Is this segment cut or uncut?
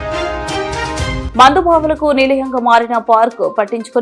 cut